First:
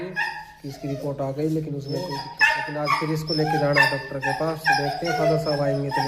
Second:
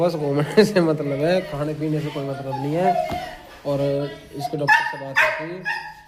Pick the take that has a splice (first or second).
first